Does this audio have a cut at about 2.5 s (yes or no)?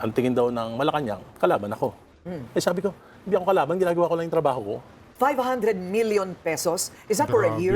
no